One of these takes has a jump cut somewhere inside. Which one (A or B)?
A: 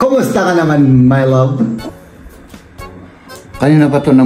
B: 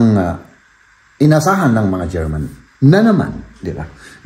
A